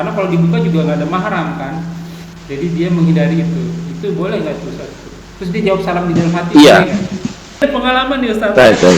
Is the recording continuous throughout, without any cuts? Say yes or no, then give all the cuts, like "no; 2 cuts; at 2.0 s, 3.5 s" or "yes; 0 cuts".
no; 1 cut; at 7.6 s